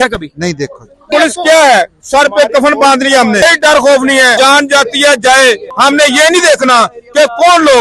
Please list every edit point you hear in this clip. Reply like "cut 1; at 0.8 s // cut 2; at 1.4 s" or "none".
cut 1; at 1.1 s // cut 2; at 3.4 s // cut 3; at 4.3 s // cut 4; at 5.7 s